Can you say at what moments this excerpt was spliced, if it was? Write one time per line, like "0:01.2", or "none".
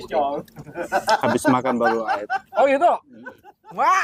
none

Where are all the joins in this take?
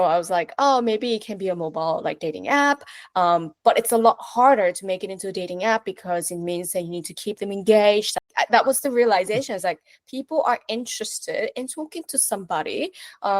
0:08.2

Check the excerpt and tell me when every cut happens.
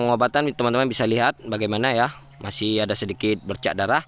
none

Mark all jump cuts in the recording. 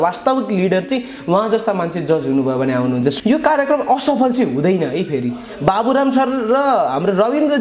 0:03.1

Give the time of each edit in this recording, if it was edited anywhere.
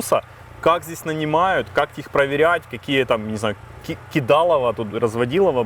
none

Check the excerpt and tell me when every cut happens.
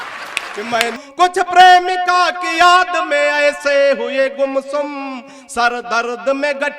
0:01.0

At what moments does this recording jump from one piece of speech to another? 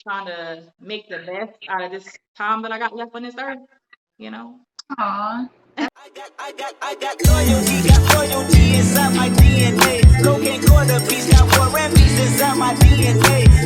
0:06.0

